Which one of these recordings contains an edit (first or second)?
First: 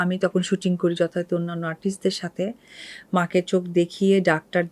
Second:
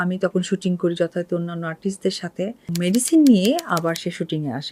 second